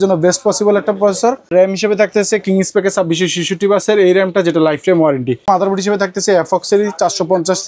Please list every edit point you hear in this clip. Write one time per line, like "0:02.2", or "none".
0:01.5
0:05.5